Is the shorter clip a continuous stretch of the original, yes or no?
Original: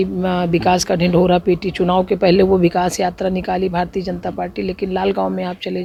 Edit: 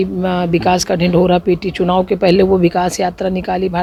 yes